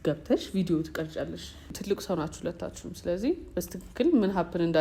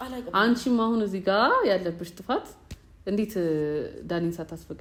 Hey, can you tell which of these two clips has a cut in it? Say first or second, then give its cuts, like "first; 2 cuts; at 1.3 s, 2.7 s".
first; 1 cut; at 1.8 s